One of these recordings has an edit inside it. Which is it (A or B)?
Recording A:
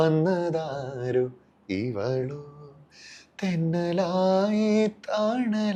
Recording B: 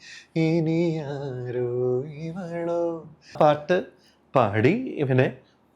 B